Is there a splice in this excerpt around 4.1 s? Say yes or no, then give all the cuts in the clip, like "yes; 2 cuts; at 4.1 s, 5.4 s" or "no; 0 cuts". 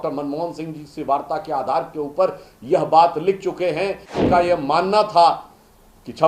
yes; 1 cut; at 4.1 s